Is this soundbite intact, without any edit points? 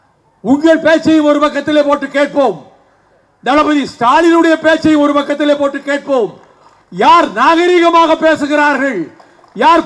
yes; 0 cuts

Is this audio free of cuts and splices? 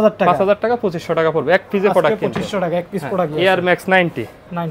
yes; 0 cuts

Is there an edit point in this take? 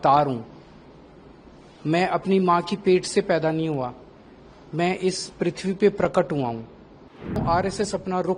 yes; 1 cut; at 7.4 s

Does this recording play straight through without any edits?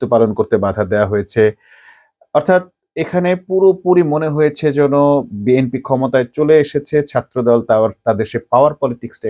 yes; 0 cuts

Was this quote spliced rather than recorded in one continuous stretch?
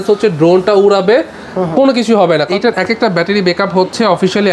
yes; 1 cut; at 2.5 s

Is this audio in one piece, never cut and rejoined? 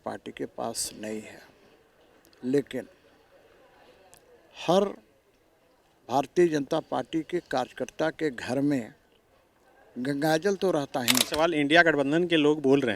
no; 1 cut; at 11.3 s

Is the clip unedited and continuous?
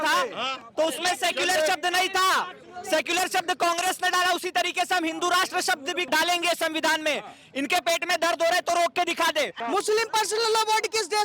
no; 2 cuts; at 6.0 s, 9.6 s

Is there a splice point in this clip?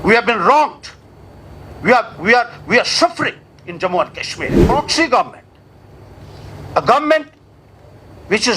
yes; 1 cut; at 4.6 s

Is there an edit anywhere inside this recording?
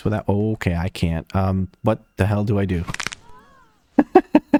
no; 0 cuts

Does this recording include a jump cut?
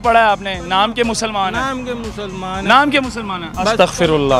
no; 0 cuts

